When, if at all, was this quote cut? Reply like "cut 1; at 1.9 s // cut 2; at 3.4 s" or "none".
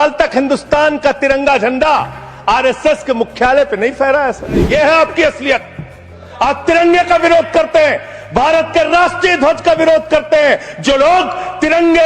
cut 1; at 4.7 s